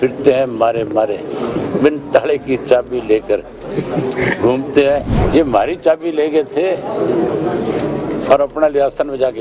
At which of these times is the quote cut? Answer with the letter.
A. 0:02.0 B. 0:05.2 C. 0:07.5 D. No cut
B